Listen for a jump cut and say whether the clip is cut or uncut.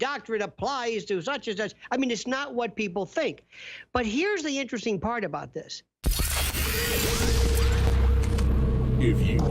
cut